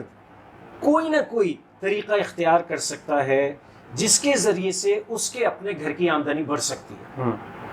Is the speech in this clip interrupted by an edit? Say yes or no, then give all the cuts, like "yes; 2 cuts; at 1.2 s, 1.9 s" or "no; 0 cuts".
no; 0 cuts